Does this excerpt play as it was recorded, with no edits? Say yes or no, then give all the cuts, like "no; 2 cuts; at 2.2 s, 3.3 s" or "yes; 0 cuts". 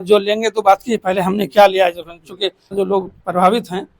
no; 1 cut; at 2.7 s